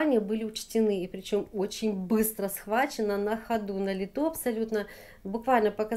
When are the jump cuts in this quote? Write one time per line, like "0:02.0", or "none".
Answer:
none